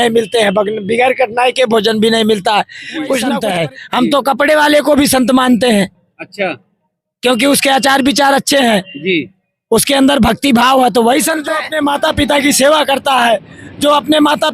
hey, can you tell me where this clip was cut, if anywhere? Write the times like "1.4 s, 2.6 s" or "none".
3.4 s, 11.6 s